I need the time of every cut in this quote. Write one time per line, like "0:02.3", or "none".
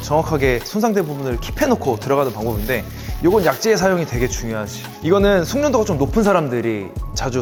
none